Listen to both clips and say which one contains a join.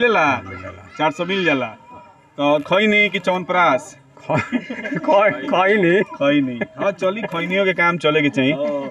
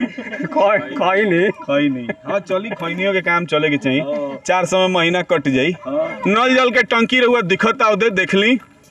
second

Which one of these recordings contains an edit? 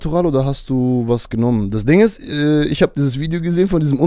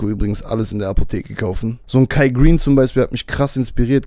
second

